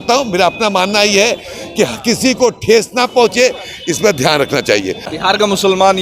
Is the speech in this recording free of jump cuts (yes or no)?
no